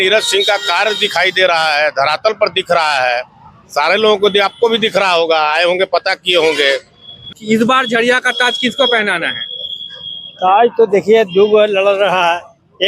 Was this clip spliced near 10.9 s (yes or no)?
no